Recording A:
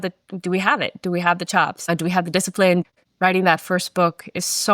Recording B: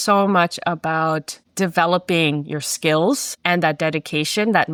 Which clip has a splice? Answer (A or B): A